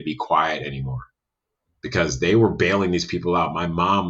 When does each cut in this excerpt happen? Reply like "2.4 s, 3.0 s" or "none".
none